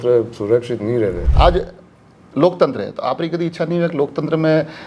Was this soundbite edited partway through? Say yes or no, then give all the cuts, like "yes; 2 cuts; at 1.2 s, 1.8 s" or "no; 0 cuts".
yes; 1 cut; at 1.2 s